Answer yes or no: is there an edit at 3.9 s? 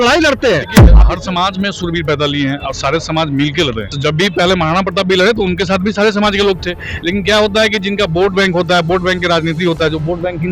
yes